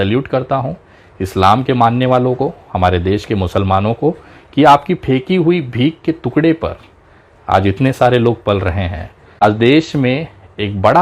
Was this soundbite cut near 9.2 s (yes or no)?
yes